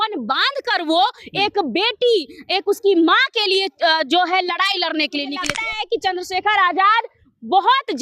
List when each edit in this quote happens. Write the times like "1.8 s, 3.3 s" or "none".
5.5 s